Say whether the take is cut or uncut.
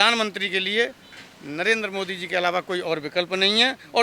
uncut